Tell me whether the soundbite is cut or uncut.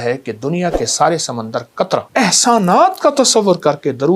cut